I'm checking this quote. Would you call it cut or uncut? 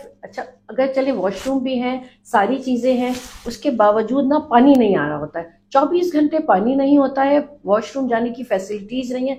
uncut